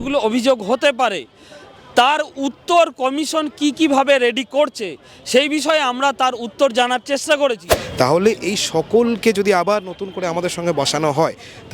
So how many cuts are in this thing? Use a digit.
1